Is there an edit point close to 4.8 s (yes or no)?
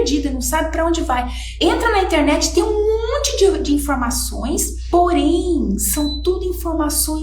yes